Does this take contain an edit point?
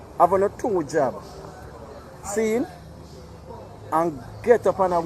no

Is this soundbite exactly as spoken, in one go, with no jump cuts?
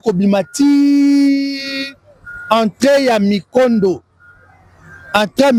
yes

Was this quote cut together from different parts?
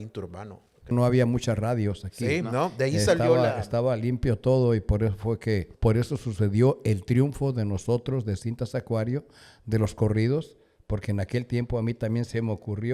yes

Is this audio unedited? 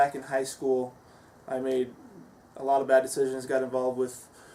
yes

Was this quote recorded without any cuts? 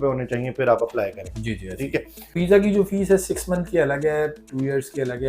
no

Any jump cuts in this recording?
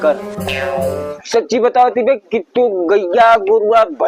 yes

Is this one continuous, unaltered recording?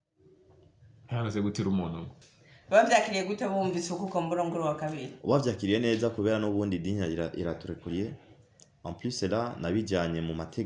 no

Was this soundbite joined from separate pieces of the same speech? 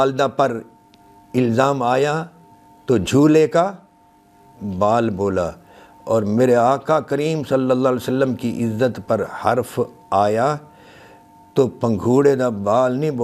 no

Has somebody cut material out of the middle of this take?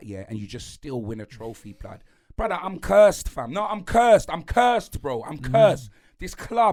no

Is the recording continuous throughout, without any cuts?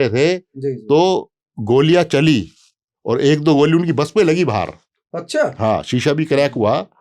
yes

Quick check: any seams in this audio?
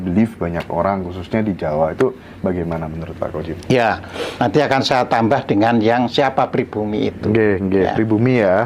no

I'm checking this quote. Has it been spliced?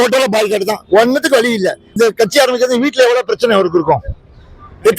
yes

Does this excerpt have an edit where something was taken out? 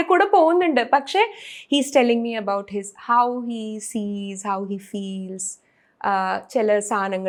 no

